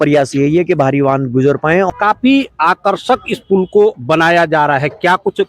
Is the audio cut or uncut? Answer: cut